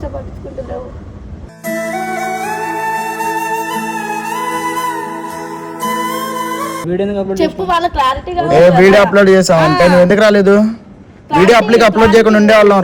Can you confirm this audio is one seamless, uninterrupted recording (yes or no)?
no